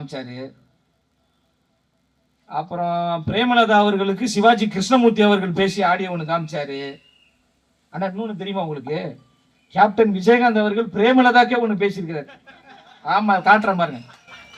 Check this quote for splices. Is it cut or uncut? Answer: uncut